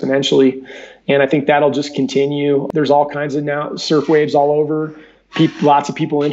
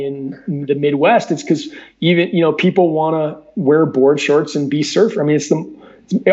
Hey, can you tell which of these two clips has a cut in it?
first; 1 cut; at 2.7 s

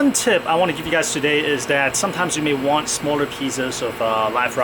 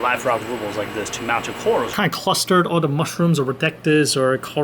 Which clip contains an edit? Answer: second; 1 cut; at 1.9 s

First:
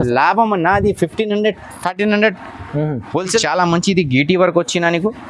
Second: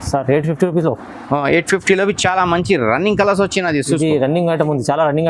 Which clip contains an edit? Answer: first; 1 cut; at 3.4 s

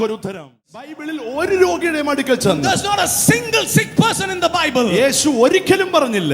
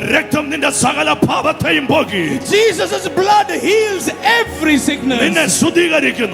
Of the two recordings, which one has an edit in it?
first; 1 cut; at 1.0 s

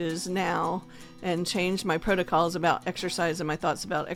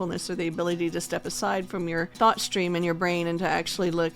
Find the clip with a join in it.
second; 1 cut; at 2.1 s

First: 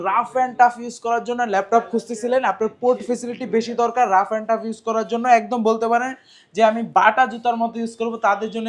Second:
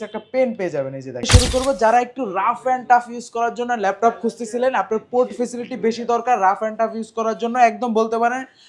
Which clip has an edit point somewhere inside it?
second; 1 cut; at 1.3 s

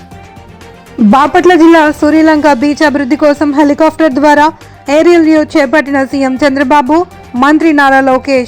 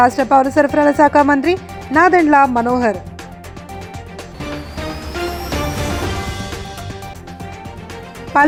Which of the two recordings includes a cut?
first; 1 cut; at 0.9 s

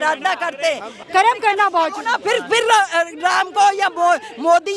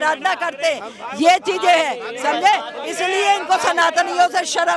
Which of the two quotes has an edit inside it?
first; 1 cut; at 0.9 s

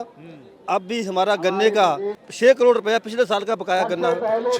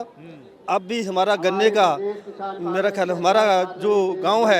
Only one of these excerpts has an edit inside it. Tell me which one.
first; 1 cut; at 2.2 s

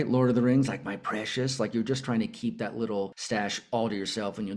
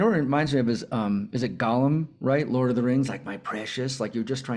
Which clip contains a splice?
first; 1 cut; at 3.2 s

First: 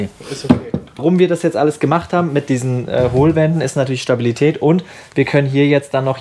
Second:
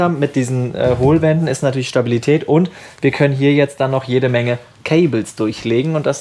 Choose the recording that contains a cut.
first; 1 cut; at 1.0 s

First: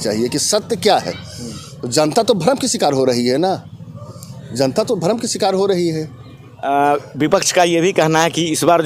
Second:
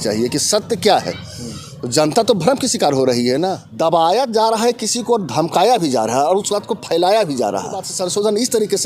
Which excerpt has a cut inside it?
second; 2 cuts; at 3.6 s, 7.9 s

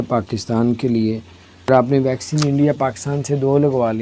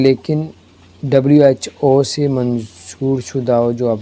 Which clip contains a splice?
first; 1 cut; at 1.7 s

